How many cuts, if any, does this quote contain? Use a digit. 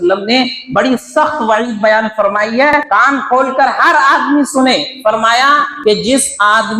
2